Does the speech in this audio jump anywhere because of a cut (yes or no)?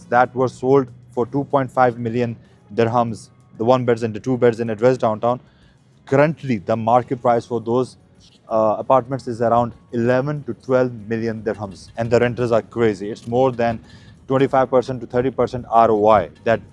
no